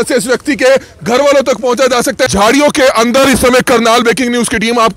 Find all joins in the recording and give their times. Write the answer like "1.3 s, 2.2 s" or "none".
2.3 s